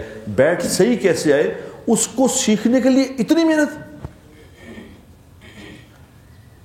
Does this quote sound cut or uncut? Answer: uncut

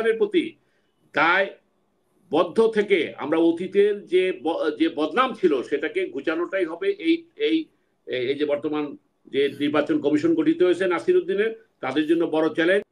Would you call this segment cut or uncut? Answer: uncut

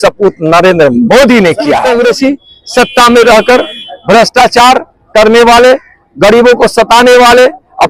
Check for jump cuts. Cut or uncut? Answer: cut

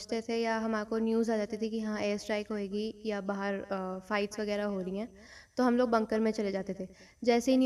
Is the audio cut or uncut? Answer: uncut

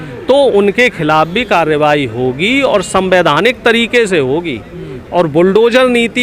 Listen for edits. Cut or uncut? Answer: uncut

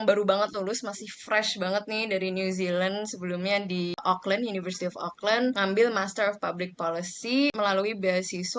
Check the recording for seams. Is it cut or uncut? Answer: cut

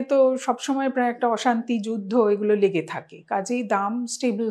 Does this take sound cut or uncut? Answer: uncut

